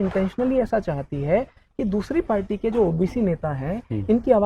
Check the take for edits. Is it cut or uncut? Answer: uncut